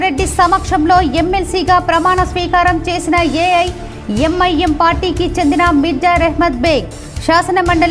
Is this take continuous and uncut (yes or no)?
yes